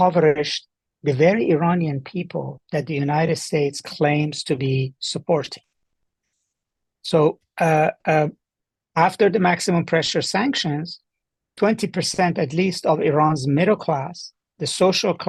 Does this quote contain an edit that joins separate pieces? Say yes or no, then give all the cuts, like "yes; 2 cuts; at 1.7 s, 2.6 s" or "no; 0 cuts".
no; 0 cuts